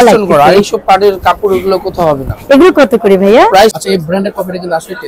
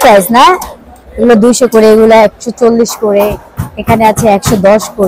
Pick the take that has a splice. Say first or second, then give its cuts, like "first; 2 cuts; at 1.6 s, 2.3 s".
first; 1 cut; at 3.7 s